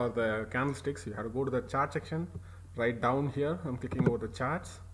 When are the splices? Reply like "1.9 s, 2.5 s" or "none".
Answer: none